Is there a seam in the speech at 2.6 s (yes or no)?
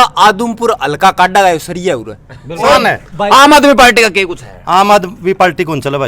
yes